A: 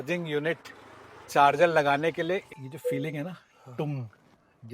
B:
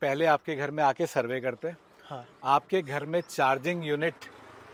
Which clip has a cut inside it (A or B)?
A